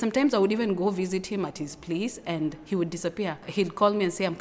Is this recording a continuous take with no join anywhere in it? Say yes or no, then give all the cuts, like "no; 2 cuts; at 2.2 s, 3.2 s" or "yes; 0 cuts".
yes; 0 cuts